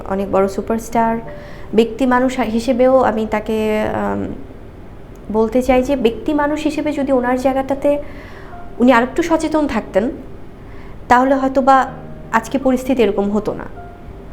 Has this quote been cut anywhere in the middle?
no; 0 cuts

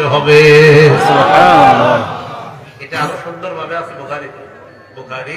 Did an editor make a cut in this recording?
no; 0 cuts

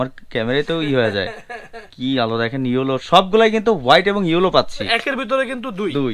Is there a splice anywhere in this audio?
yes; 1 cut; at 4.9 s

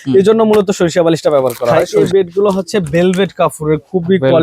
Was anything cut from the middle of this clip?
yes; 1 cut; at 1.9 s

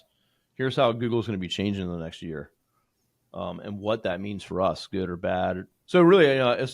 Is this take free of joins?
no; 1 cut; at 5.7 s

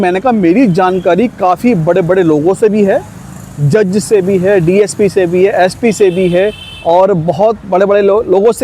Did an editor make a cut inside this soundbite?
no; 0 cuts

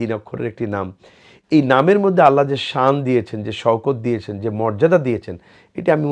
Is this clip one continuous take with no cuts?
yes; 0 cuts

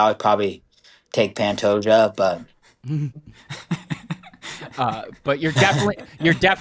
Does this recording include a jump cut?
no; 0 cuts

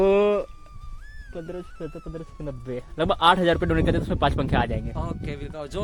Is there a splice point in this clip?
no; 0 cuts

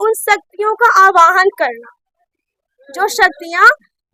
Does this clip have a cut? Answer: no; 0 cuts

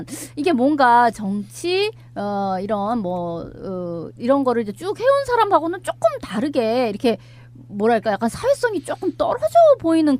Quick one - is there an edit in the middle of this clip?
yes; 1 cut; at 5.0 s

